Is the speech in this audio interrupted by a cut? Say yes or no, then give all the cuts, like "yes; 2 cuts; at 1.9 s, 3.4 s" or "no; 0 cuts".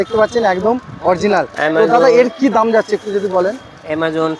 no; 0 cuts